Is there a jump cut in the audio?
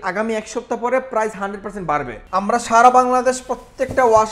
yes; 1 cut; at 2.2 s

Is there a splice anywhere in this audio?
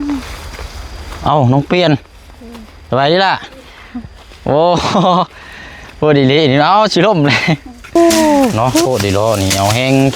yes; 1 cut; at 8.0 s

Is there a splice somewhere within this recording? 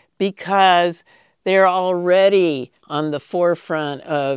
no; 0 cuts

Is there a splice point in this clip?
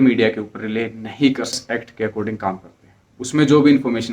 yes; 1 cut; at 1.7 s

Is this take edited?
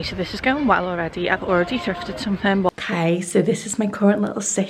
yes; 1 cut; at 2.7 s

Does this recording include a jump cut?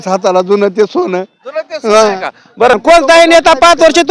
yes; 1 cut; at 2.7 s

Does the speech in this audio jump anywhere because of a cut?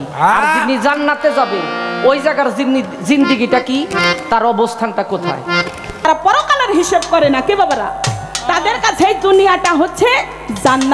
yes; 1 cut; at 6.1 s

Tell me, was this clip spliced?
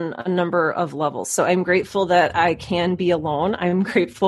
no; 0 cuts

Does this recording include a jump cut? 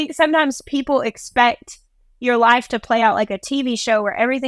no; 0 cuts

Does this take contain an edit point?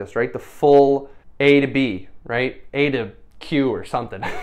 yes; 1 cut; at 1.2 s

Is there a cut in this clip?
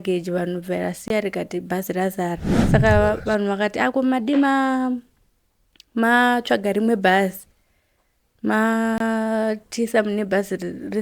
yes; 1 cut; at 2.5 s

